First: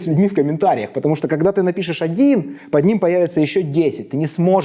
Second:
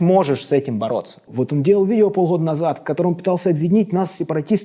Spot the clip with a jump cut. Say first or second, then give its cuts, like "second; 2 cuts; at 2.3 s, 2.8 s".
second; 1 cut; at 1.3 s